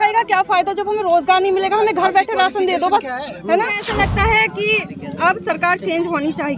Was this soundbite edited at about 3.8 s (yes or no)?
yes